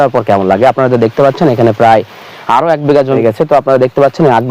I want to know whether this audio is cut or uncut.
cut